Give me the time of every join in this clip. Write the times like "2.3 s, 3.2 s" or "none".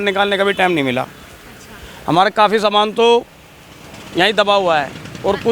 none